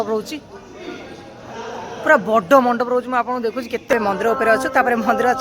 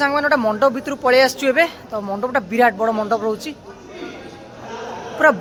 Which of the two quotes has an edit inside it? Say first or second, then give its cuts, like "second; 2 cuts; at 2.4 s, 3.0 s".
first; 1 cut; at 3.9 s